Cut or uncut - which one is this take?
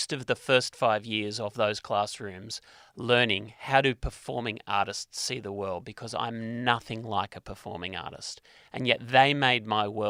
uncut